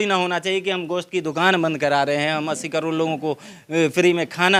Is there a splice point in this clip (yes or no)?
no